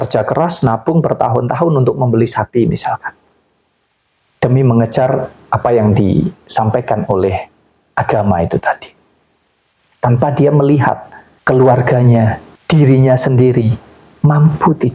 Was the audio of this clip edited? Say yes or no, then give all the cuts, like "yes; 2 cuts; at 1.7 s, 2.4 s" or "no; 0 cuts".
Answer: no; 0 cuts